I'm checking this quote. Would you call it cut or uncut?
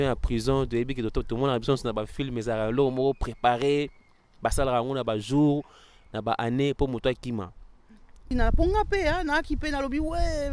cut